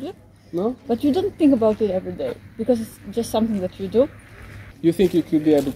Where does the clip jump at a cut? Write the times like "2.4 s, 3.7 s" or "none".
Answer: 4.6 s